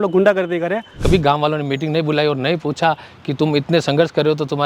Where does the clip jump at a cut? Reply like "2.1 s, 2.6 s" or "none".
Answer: 1.0 s

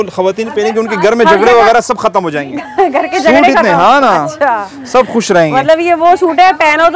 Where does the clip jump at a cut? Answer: none

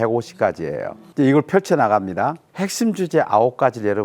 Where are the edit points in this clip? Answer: 1.0 s, 2.5 s

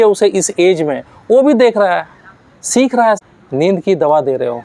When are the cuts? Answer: 3.2 s

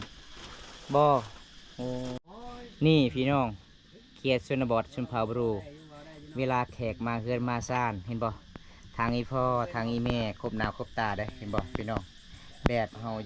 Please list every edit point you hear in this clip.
2.3 s

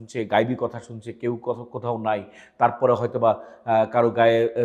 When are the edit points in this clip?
none

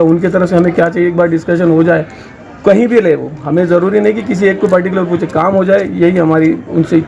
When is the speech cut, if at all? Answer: none

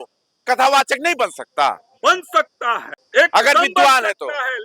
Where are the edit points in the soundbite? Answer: 2.9 s

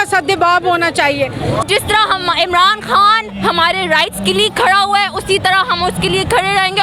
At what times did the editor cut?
1.7 s

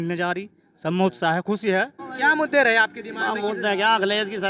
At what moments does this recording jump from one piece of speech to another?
2.0 s

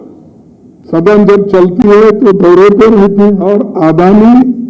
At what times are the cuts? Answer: 3.4 s

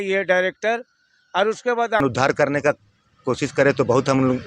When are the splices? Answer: 2.0 s

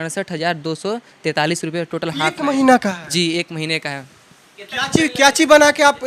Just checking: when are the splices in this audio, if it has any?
none

